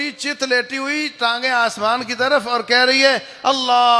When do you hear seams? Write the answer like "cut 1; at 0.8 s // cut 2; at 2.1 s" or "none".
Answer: none